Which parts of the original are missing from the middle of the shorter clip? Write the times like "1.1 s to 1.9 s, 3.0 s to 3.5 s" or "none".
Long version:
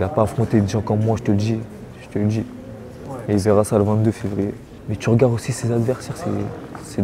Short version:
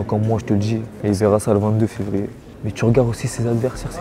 1.7 s to 3.2 s

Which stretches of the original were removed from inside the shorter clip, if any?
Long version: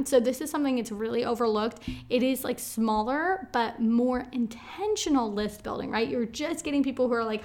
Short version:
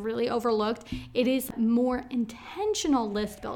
2.4 s to 3.7 s

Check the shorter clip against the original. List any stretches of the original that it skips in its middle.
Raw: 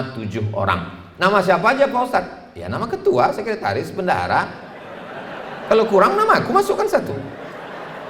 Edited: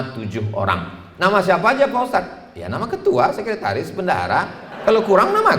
4.6 s to 5.5 s

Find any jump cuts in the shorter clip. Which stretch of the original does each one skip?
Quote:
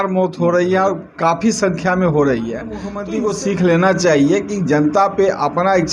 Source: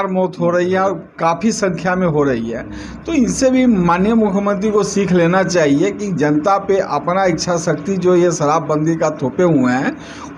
2.9 s to 4.5 s

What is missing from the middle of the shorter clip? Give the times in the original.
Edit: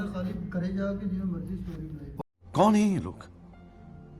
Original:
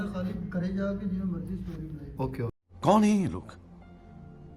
2.2 s to 2.5 s

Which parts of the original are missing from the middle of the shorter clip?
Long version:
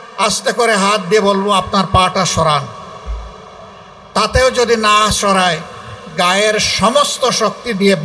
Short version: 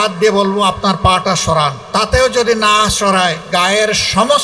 2.7 s to 4.0 s, 5.6 s to 6.1 s

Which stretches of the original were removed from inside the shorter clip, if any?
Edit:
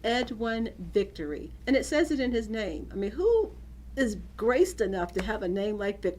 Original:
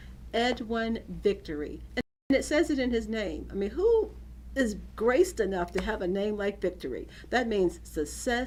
1.9 s to 2.2 s

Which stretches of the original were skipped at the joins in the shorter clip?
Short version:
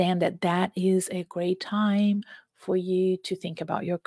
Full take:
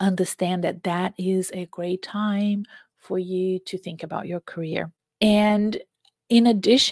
none

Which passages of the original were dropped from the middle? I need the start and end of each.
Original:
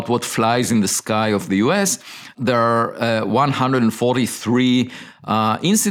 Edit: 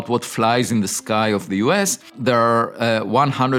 2.0 s to 2.2 s

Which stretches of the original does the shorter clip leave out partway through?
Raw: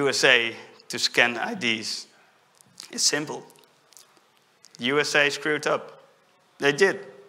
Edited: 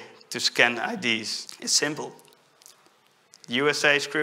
2.0 s to 2.7 s

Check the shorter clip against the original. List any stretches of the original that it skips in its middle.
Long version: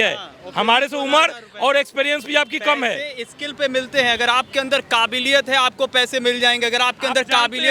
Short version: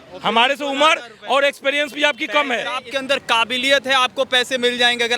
3.2 s to 4.5 s

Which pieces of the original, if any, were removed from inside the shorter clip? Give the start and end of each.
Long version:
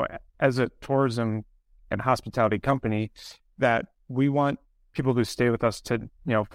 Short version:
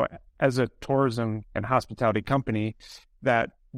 1.5 s to 1.8 s

